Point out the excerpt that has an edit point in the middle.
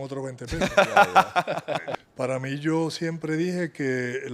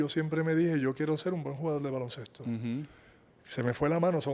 first; 1 cut; at 1.9 s

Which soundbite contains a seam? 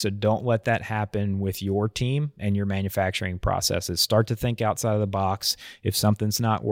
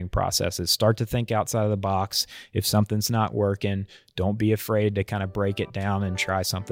first; 1 cut; at 2.4 s

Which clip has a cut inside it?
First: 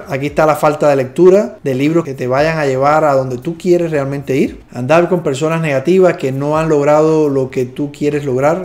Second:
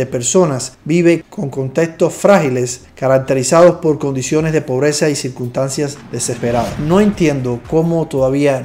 second; 1 cut; at 6.7 s

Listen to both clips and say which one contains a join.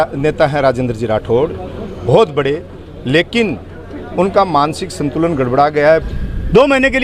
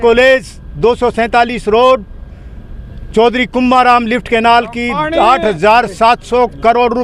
first; 1 cut; at 6.1 s

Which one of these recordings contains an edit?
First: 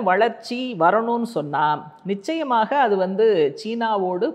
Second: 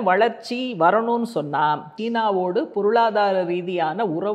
second; 1 cut; at 2.0 s

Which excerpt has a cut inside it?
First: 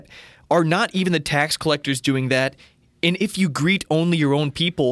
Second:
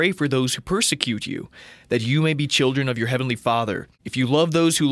second; 1 cut; at 4.0 s

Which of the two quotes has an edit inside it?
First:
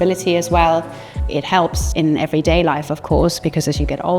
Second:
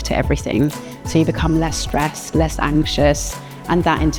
first; 1 cut; at 1.5 s

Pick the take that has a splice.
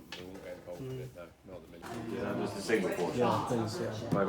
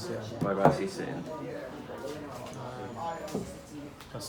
first; 1 cut; at 1.8 s

